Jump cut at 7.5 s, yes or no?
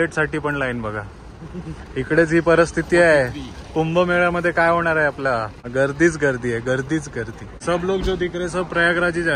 yes